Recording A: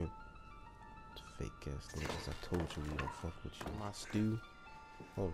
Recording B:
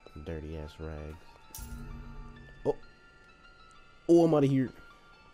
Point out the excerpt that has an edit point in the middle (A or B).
A